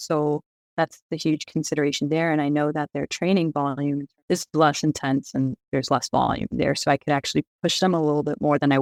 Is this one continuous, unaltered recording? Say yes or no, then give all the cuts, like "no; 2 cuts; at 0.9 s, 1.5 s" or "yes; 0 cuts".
yes; 0 cuts